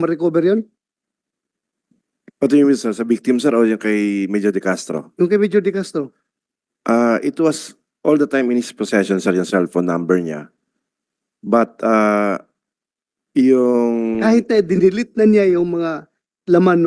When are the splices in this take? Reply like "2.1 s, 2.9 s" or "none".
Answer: none